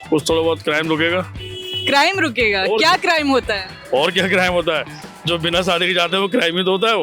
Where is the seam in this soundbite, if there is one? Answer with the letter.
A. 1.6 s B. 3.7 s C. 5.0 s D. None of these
D